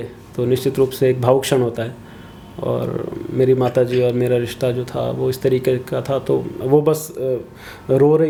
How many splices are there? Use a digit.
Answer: 0